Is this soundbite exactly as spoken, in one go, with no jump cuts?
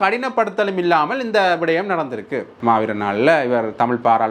no; 1 cut; at 2.5 s

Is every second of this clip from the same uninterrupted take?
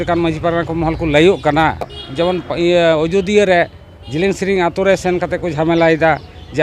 no; 1 cut; at 2.0 s

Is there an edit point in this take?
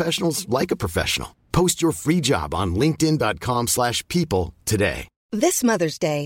yes; 1 cut; at 5.1 s

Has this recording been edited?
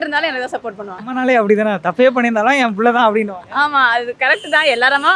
no; 0 cuts

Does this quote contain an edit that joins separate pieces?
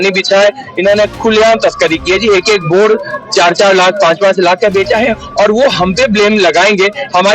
no; 0 cuts

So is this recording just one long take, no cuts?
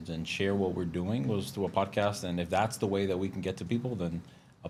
yes; 0 cuts

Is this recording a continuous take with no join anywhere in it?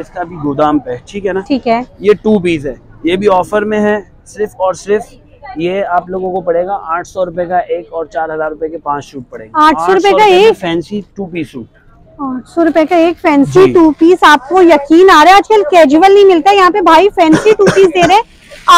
yes; 0 cuts

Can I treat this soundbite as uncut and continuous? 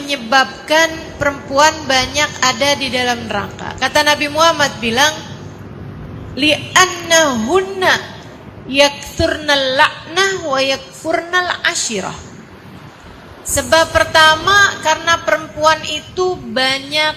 yes; 0 cuts

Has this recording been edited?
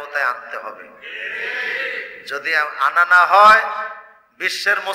no; 0 cuts

